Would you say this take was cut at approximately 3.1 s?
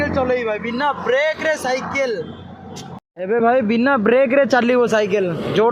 yes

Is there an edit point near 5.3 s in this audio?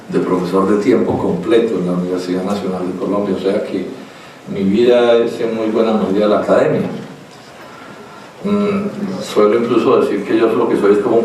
no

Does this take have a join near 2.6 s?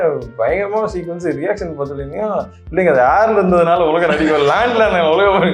no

